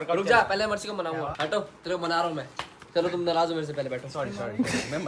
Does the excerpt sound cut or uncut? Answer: cut